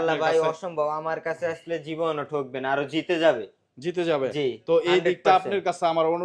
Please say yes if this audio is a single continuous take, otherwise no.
yes